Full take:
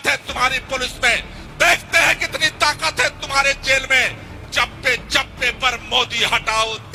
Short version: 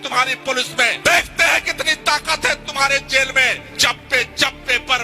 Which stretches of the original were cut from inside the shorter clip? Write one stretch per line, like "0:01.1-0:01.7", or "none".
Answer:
0:01.2-0:01.5
0:04.2-0:04.4